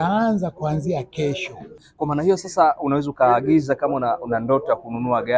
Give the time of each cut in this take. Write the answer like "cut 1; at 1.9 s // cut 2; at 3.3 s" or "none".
cut 1; at 1.8 s